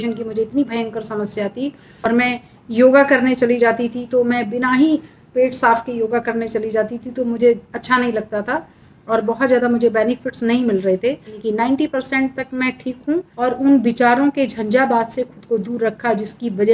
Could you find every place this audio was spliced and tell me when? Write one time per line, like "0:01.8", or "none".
0:02.0
0:11.3
0:13.3